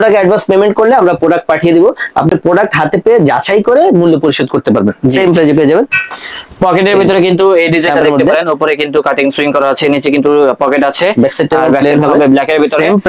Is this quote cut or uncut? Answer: uncut